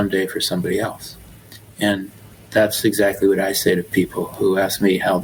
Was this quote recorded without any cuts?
yes; 0 cuts

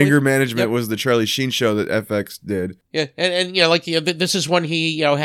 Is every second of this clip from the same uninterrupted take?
no; 1 cut; at 2.9 s

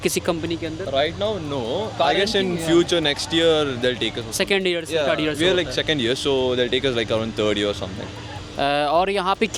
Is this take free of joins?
yes; 0 cuts

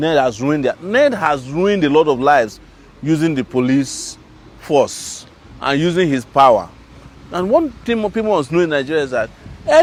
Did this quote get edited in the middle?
no; 0 cuts

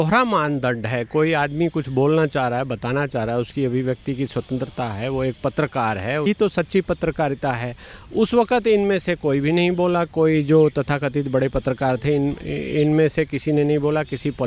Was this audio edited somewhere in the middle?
yes; 1 cut; at 6.3 s

